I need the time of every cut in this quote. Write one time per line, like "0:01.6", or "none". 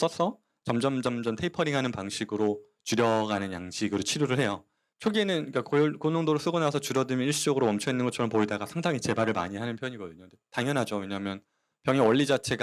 0:04.9